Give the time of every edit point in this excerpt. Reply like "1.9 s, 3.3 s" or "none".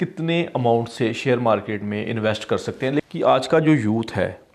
3.0 s